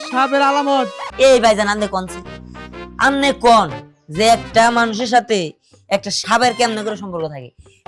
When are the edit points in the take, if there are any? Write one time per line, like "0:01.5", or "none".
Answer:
0:01.0